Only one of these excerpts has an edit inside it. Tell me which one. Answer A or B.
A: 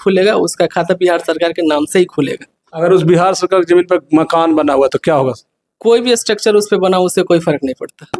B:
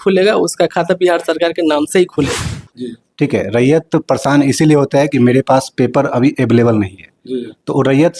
B